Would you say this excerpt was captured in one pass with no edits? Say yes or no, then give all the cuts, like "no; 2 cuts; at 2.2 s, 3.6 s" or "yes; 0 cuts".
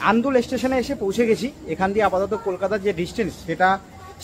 yes; 0 cuts